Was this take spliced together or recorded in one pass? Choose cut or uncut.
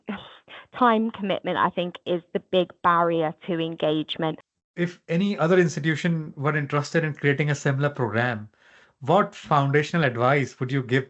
cut